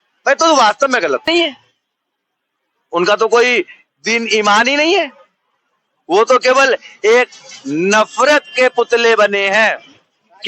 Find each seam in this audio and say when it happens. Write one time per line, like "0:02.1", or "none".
0:01.2